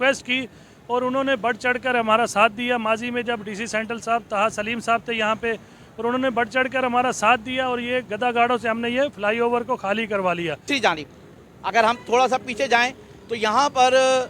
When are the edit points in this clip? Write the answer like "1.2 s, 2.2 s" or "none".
10.7 s